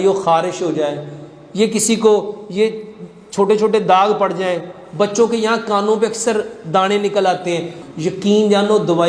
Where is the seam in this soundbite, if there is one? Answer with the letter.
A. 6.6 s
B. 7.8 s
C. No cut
B